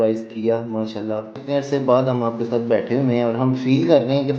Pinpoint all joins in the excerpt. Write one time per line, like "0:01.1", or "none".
0:01.4